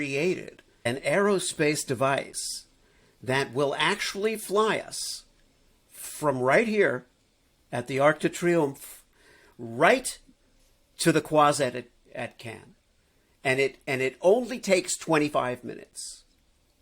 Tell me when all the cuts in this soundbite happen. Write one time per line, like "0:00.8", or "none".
0:00.9